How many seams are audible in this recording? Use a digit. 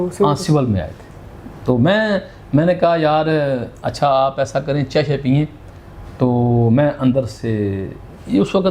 0